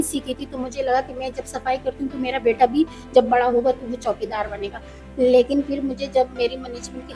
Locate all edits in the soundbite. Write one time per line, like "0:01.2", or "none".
none